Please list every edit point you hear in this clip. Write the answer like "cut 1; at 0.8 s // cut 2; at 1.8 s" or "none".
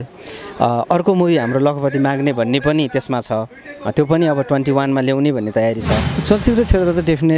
cut 1; at 6.1 s